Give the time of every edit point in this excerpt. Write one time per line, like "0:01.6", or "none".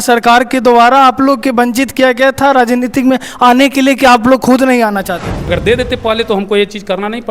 0:05.5

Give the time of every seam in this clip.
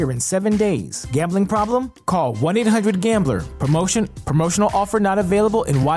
none

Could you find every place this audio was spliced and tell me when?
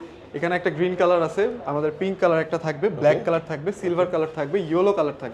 none

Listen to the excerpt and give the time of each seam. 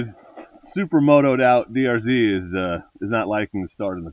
none

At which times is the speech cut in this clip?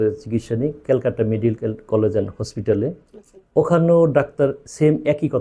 none

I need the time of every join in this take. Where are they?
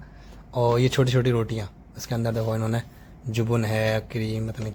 none

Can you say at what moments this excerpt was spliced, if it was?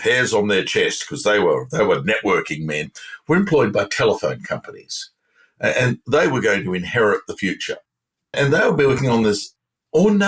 0:08.3

